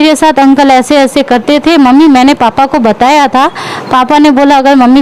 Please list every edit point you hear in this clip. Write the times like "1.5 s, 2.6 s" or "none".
none